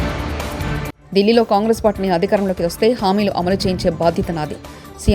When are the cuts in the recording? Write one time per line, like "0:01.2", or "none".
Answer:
0:00.9